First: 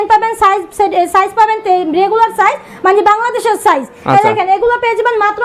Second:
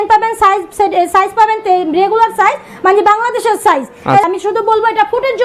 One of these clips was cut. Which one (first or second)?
second